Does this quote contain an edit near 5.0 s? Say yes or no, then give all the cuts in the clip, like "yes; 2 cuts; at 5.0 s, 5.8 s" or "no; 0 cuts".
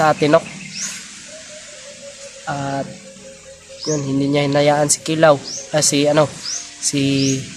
no; 0 cuts